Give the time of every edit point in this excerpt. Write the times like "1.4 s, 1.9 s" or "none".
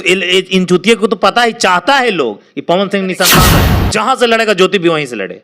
3.5 s